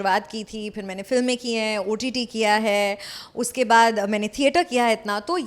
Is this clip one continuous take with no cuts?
yes; 0 cuts

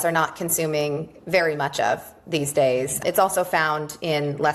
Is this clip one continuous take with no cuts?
yes; 0 cuts

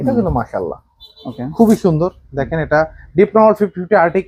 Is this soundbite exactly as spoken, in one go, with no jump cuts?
yes; 0 cuts

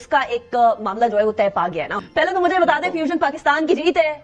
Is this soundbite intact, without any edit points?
no; 1 cut; at 2.0 s

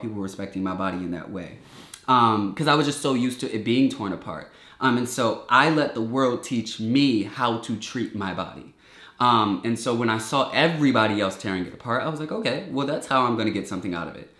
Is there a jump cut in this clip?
no; 0 cuts

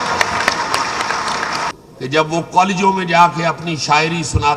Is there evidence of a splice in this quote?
yes; 1 cut; at 1.7 s

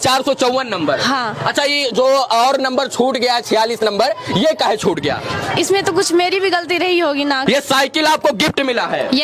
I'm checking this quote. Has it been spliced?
yes; 1 cut; at 7.4 s

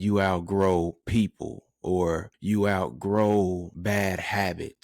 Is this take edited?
yes; 2 cuts; at 2.3 s, 3.7 s

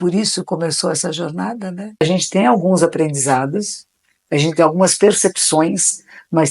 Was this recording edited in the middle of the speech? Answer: yes; 1 cut; at 1.9 s

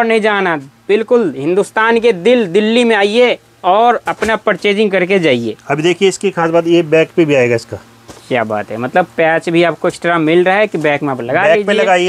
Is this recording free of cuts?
yes; 0 cuts

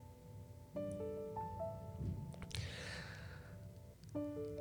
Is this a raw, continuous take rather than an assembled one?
yes; 0 cuts

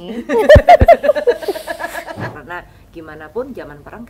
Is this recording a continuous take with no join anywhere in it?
no; 1 cut; at 2.3 s

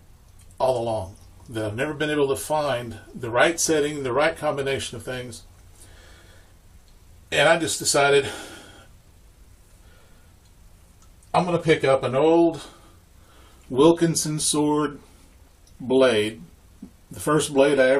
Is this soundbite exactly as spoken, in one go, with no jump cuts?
yes; 0 cuts

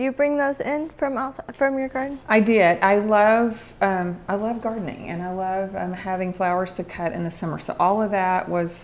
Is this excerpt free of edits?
yes; 0 cuts

